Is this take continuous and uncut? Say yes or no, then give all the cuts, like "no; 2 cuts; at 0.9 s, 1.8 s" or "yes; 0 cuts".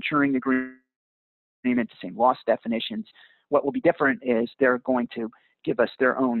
yes; 0 cuts